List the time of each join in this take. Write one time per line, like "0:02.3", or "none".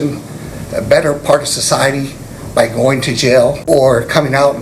0:03.6